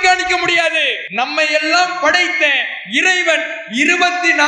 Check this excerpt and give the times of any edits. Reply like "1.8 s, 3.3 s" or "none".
1.0 s

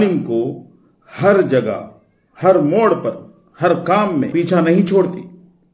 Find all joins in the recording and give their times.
4.3 s

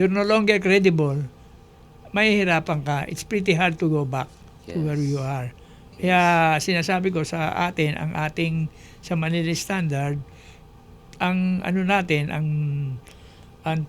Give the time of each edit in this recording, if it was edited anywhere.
none

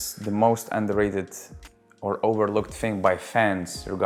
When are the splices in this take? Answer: none

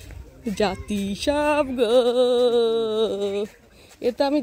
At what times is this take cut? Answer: none

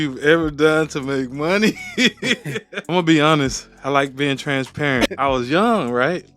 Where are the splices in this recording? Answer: 2.7 s, 5.1 s

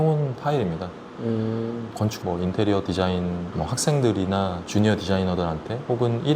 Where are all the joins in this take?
2.1 s, 3.5 s, 4.6 s

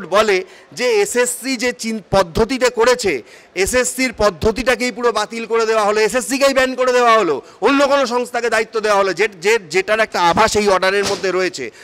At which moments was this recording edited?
none

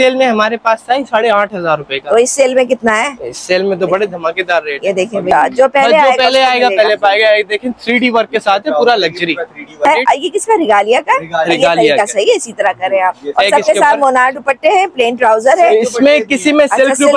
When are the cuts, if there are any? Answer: 5.3 s, 9.9 s

